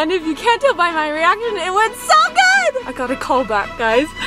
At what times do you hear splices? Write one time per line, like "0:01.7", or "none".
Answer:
0:02.9